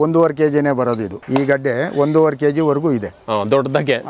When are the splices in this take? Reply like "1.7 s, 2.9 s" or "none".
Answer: none